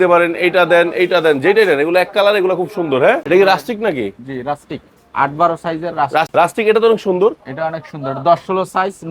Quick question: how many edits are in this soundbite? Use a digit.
2